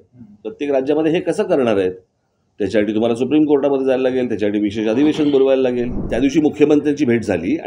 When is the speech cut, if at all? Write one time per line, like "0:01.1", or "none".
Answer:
0:06.0